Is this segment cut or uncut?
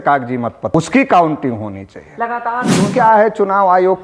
cut